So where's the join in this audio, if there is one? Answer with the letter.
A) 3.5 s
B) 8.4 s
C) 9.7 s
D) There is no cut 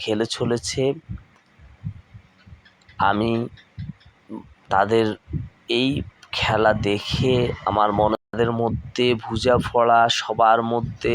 B